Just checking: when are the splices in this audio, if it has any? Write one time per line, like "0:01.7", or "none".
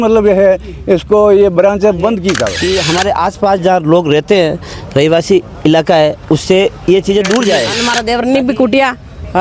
0:02.6
0:07.8